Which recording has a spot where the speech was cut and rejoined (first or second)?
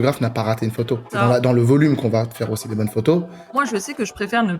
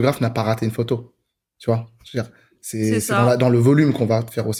first